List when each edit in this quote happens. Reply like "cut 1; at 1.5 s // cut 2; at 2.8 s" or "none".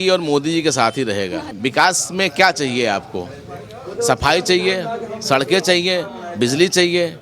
cut 1; at 1.5 s